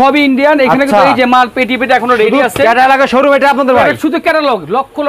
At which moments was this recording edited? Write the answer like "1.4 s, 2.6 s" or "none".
none